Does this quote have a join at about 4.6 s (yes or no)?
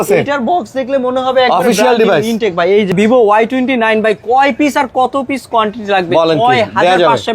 no